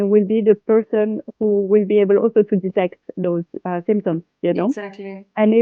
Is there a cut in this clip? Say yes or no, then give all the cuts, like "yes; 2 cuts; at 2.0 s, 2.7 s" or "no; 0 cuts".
no; 0 cuts